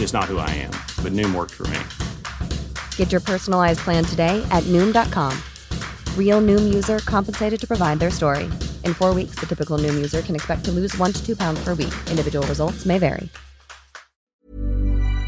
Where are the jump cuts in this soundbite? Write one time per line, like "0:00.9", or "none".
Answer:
0:14.2